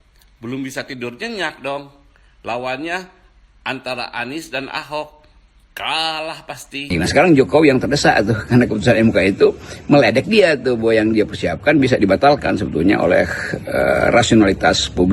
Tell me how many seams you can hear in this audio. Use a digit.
1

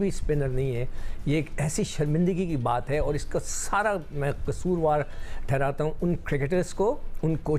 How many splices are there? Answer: 0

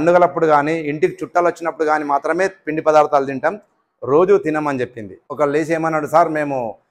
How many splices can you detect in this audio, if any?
1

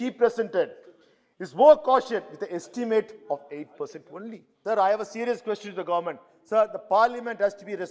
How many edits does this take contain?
1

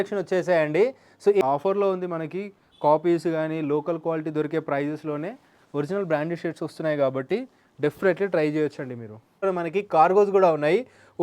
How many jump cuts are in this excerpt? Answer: 2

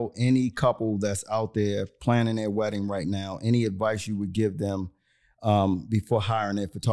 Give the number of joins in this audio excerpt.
0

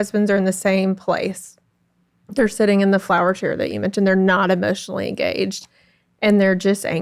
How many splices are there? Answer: 0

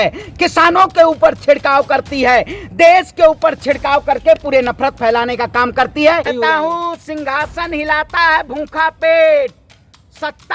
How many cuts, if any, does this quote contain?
1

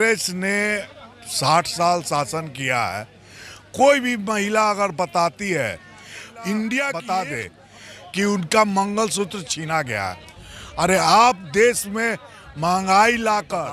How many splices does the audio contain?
1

